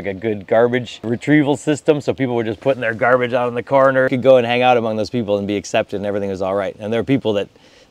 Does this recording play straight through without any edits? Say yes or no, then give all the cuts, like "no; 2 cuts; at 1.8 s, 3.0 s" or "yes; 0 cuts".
no; 2 cuts; at 1.1 s, 4.1 s